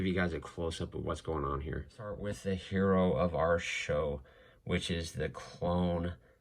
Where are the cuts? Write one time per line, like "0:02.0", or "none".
0:02.3